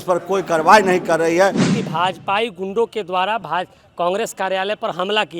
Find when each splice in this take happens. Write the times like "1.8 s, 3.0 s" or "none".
1.7 s